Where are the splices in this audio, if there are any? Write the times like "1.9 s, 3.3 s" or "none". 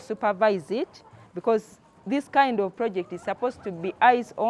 none